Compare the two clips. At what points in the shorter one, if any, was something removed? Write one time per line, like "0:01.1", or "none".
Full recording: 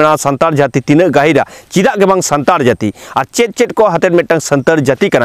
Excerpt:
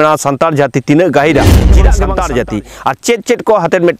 0:01.8